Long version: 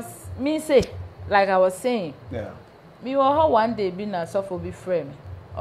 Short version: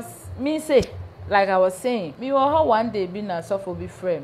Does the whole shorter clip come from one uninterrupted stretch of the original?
no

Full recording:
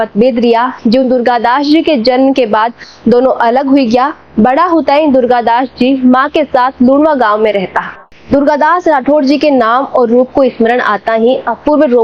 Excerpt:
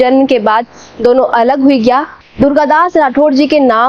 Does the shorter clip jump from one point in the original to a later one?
yes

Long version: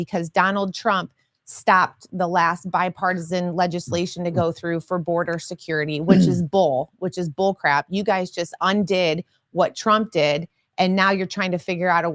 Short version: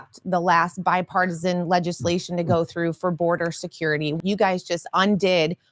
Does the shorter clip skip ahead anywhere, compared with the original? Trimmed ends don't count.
yes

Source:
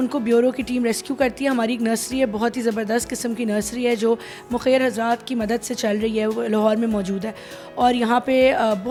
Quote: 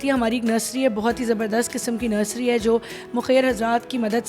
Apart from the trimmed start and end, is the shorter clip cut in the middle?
no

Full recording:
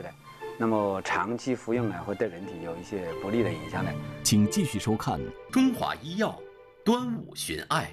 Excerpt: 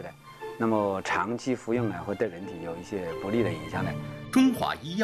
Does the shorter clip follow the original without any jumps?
no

